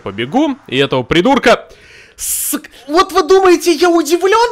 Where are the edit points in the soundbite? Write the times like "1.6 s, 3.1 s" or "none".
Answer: 2.7 s